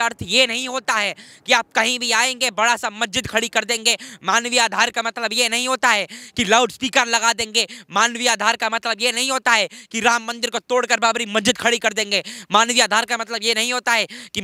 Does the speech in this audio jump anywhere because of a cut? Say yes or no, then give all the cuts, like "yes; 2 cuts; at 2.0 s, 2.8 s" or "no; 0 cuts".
no; 0 cuts